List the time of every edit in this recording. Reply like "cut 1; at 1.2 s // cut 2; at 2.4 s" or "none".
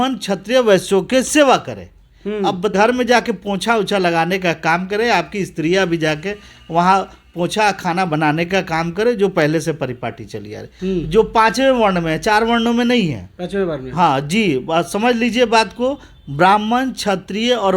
cut 1; at 2.7 s // cut 2; at 10.7 s